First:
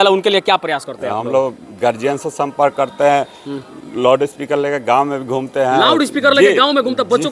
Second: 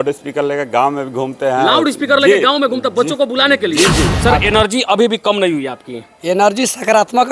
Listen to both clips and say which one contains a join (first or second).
second